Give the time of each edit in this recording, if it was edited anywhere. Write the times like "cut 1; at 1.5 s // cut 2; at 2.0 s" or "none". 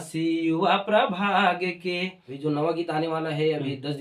cut 1; at 2.2 s